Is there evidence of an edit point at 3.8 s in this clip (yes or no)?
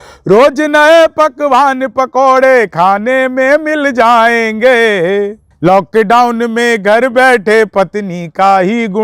no